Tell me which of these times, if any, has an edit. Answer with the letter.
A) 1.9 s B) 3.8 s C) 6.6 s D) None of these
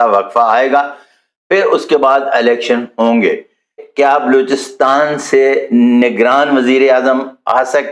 B